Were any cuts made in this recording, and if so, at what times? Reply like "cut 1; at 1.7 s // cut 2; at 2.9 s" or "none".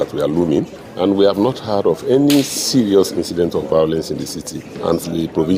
none

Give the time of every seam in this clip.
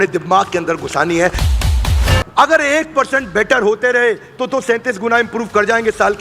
cut 1; at 1.7 s

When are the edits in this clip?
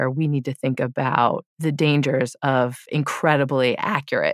cut 1; at 1.5 s // cut 2; at 2.8 s

